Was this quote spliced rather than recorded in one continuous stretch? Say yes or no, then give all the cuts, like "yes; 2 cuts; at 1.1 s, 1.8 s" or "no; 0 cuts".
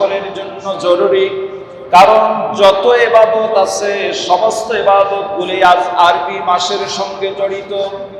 no; 0 cuts